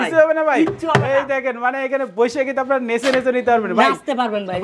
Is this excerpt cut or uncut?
uncut